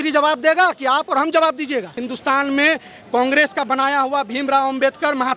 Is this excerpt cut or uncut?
cut